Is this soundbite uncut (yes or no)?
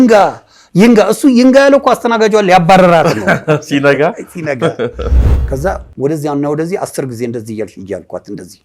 no